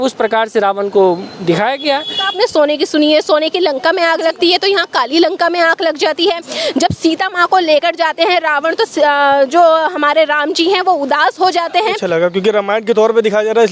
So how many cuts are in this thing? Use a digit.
2